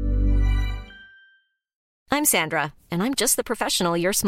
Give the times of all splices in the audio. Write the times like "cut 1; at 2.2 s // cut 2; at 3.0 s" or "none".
cut 1; at 1.9 s